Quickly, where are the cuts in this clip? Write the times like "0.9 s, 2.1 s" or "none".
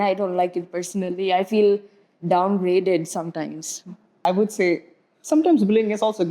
4.2 s